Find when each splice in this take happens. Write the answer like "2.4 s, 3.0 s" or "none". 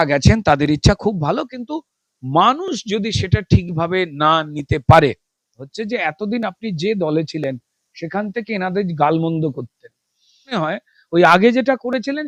5.6 s, 10.6 s